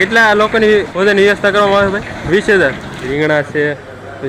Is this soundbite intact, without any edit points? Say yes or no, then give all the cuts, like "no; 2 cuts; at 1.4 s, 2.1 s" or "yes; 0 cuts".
no; 3 cuts; at 0.9 s, 2.2 s, 3.1 s